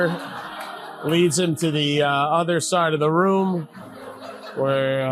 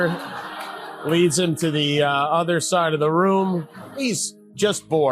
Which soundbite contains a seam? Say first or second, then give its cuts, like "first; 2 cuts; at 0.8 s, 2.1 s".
second; 1 cut; at 4.0 s